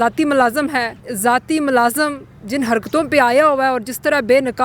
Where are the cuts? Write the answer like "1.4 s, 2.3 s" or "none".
1.0 s